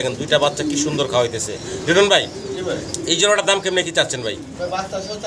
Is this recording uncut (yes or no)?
yes